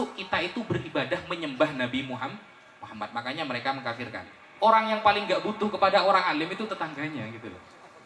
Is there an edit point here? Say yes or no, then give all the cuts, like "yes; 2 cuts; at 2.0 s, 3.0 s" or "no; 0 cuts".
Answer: yes; 1 cut; at 4.4 s